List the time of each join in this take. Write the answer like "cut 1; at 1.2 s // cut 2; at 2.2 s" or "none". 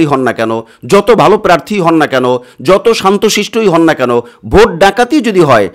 none